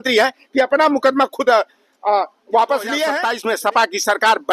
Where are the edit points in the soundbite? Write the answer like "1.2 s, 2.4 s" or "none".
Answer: 3.3 s